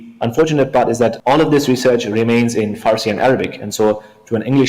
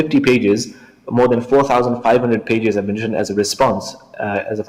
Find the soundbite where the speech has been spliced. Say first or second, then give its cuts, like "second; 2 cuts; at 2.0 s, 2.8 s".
first; 1 cut; at 1.2 s